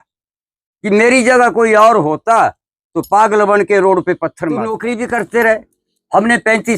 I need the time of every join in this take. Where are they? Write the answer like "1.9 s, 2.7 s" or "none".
4.8 s

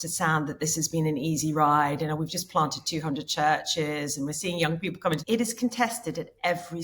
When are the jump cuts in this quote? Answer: 5.2 s

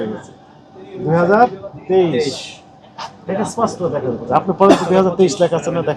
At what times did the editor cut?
none

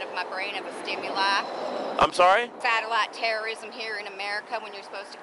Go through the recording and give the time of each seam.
2.5 s

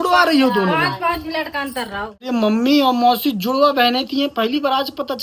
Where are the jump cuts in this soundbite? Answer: 2.3 s

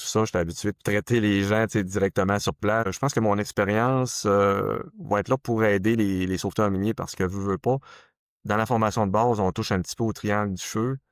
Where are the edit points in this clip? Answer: 2.9 s

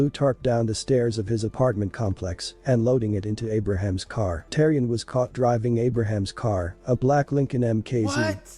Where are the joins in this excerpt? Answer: 4.4 s

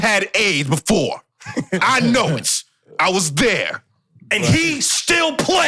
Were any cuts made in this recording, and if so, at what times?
none

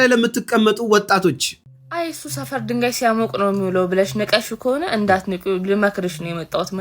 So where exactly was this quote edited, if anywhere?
1.5 s

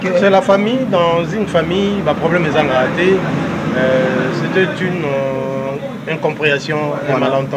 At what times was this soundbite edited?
none

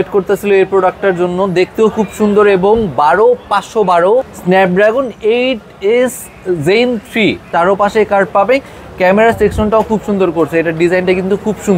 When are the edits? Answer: 4.3 s, 7.4 s

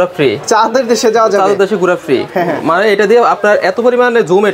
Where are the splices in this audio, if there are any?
none

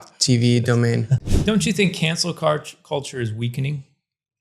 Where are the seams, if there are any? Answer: 1.2 s

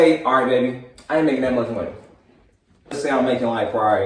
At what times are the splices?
2.9 s

